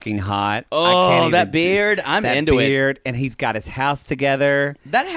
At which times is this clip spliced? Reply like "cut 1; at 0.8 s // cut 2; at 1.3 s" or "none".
none